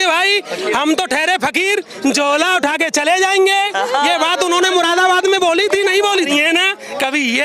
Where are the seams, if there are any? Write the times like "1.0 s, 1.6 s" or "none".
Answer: 6.1 s